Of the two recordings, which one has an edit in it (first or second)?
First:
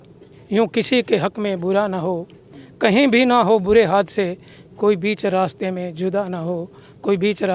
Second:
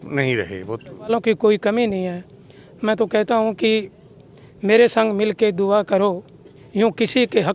second